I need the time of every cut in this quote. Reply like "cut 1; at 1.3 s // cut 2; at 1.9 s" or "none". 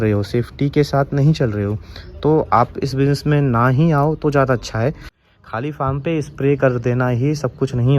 cut 1; at 5.1 s